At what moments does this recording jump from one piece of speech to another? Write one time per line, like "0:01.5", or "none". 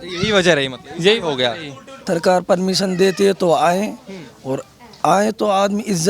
0:02.0